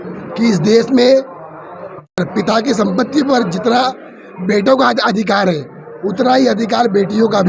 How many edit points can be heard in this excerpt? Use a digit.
1